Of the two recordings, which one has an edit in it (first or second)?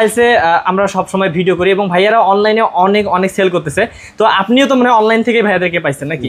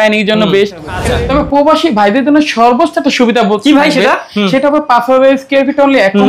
second